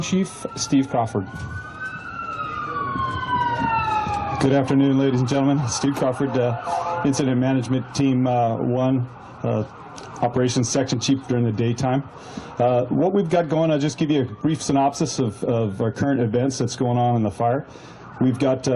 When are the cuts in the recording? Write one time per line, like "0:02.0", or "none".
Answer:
none